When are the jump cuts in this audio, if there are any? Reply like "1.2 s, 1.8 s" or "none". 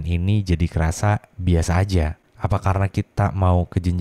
2.2 s